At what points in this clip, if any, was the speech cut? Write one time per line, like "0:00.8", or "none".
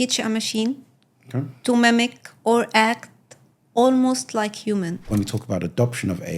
0:05.0